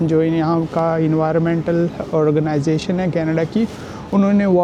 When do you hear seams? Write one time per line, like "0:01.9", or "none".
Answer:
none